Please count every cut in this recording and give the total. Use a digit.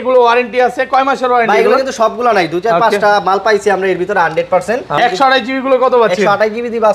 1